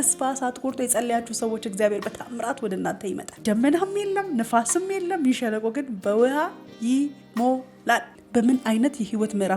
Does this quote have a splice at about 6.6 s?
no; 2 cuts; at 3.3 s, 8.2 s

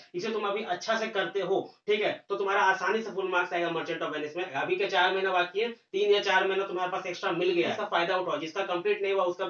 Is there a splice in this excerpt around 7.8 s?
yes; 2 cuts; at 4.6 s, 7.8 s

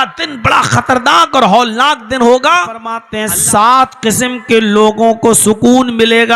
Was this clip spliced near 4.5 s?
no; 1 cut; at 3.1 s

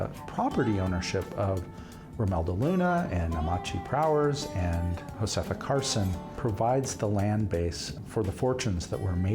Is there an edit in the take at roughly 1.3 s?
no; 3 cuts; at 5.0 s, 6.3 s, 7.9 s

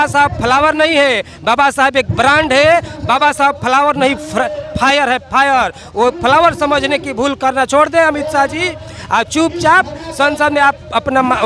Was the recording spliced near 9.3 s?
no; 0 cuts

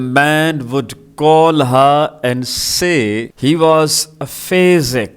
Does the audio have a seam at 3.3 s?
yes; 1 cut; at 3.3 s

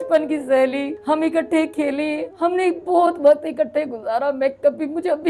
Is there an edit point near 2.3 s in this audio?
yes; 2 cuts; at 0.9 s, 2.3 s

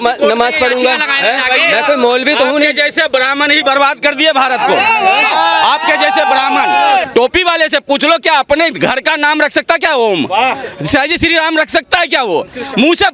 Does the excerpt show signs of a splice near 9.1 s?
no; 1 cut; at 7.1 s

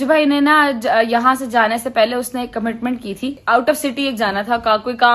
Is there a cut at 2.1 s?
no; 1 cut; at 3.4 s

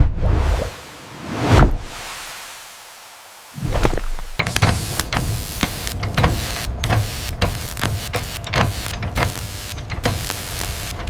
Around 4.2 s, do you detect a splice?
yes; 1 cut; at 4.2 s

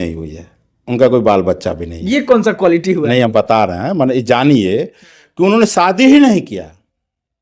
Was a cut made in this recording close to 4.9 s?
no; 0 cuts

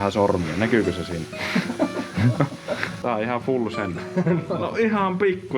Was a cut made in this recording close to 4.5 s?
yes; 2 cuts; at 2.9 s, 4.5 s

